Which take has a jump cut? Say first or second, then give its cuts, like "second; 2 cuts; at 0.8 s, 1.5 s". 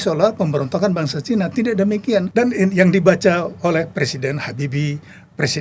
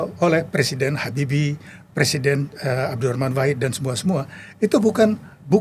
first; 1 cut; at 2.3 s